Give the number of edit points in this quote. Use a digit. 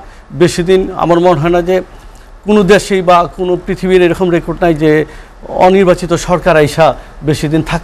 0